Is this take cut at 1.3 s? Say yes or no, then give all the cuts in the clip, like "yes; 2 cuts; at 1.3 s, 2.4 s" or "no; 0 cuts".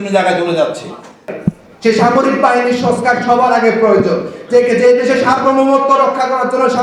yes; 1 cut; at 1.3 s